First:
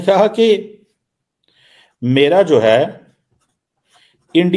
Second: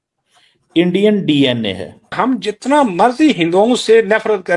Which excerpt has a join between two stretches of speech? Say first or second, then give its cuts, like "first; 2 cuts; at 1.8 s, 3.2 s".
second; 1 cut; at 2.2 s